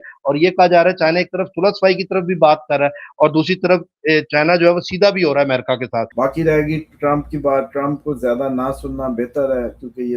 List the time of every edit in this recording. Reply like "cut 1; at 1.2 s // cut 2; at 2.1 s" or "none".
cut 1; at 6.1 s